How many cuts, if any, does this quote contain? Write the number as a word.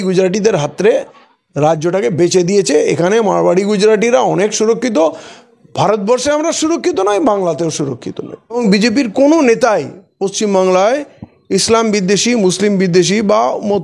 one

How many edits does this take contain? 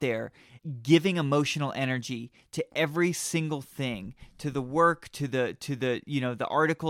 zero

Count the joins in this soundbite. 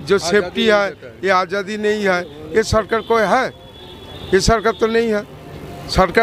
zero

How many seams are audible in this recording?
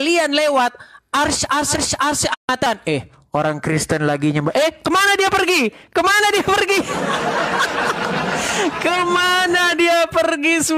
one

